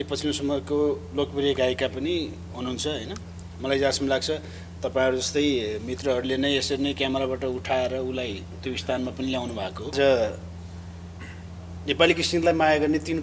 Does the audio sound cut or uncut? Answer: cut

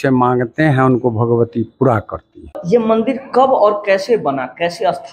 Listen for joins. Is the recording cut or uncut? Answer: cut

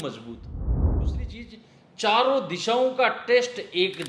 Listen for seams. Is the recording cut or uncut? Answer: cut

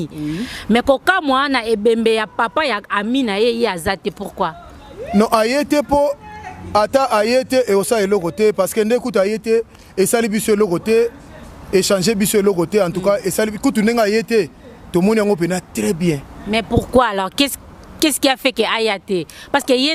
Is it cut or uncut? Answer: uncut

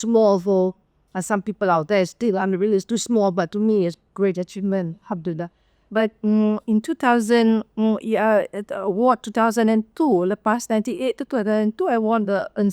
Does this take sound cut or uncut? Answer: uncut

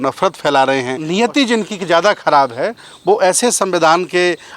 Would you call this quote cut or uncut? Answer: cut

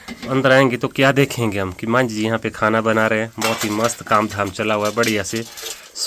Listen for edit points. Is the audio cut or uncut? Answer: uncut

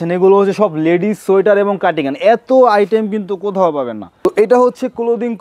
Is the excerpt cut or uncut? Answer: cut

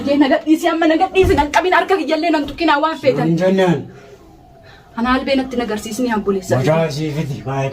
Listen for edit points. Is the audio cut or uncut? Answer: uncut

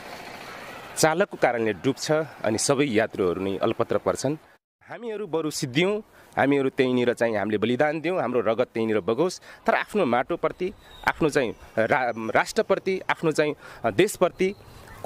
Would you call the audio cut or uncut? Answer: cut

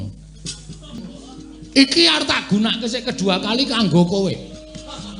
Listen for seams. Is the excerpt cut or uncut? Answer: cut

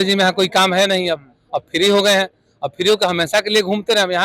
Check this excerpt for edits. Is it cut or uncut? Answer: uncut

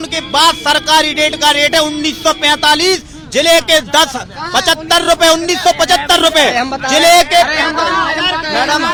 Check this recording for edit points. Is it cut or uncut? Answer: uncut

